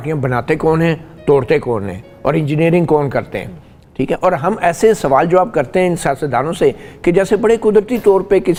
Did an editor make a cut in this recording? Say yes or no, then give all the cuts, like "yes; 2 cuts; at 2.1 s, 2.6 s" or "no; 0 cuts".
no; 0 cuts